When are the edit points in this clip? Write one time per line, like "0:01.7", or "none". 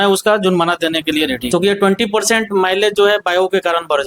0:01.5